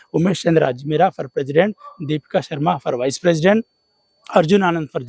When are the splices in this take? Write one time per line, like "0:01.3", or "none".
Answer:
none